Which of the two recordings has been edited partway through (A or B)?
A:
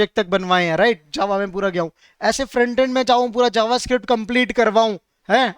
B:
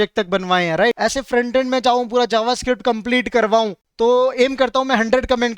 B